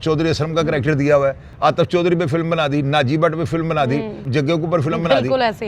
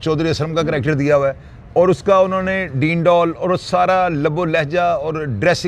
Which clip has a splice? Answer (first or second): first